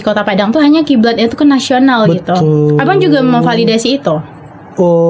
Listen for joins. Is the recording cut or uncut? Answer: uncut